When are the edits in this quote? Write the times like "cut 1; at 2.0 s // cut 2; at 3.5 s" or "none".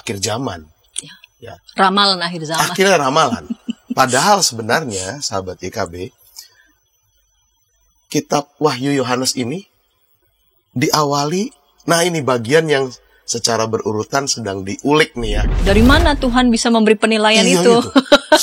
cut 1; at 15.4 s